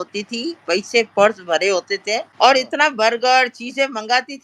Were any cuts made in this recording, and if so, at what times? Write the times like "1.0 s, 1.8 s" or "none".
2.3 s